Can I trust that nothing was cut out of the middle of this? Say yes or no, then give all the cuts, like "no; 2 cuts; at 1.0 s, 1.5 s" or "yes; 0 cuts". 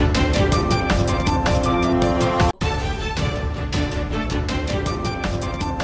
yes; 0 cuts